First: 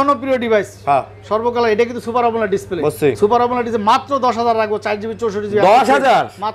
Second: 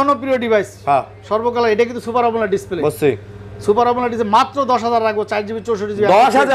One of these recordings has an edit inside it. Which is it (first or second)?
first